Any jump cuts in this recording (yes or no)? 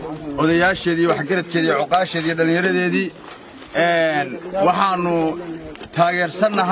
no